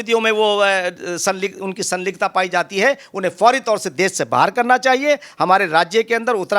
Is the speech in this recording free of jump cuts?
yes; 0 cuts

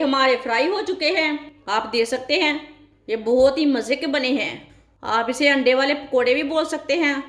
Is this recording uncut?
no; 1 cut; at 1.5 s

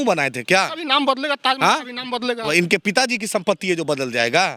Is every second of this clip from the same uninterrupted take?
yes; 0 cuts

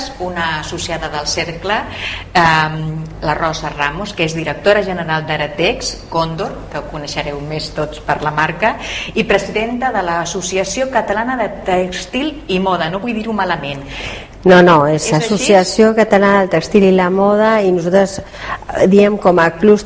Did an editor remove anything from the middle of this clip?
no; 0 cuts

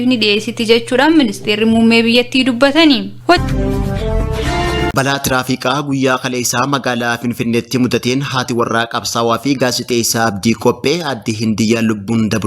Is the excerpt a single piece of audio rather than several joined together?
no; 2 cuts; at 3.4 s, 4.9 s

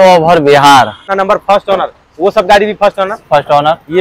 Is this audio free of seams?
no; 1 cut; at 1.0 s

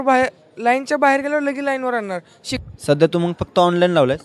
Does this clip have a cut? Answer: yes; 1 cut; at 2.5 s

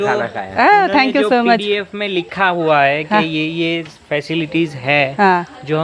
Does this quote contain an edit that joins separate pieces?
no; 0 cuts

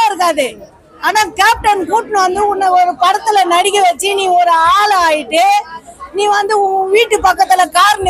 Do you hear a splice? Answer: no; 0 cuts

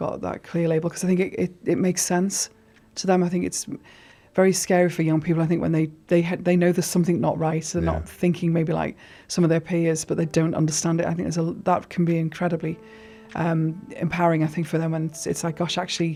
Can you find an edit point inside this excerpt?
no; 0 cuts

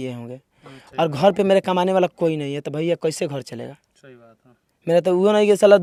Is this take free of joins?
yes; 0 cuts

